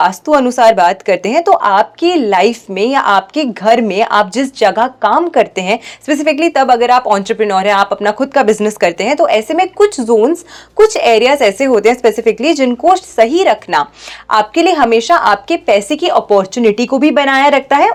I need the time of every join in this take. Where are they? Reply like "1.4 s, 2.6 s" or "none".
none